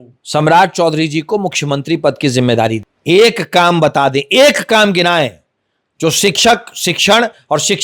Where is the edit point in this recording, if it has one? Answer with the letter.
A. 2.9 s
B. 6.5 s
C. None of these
A